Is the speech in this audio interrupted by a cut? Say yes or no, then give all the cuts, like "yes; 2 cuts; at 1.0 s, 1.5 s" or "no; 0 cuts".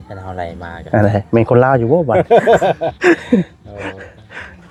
no; 0 cuts